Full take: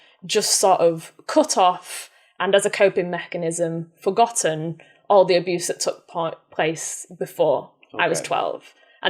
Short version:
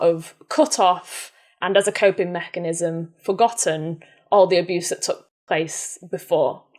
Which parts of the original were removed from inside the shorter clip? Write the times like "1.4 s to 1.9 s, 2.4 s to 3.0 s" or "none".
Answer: 6.1 s to 6.4 s